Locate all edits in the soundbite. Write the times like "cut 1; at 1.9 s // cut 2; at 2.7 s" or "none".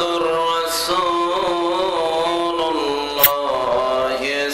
cut 1; at 3.3 s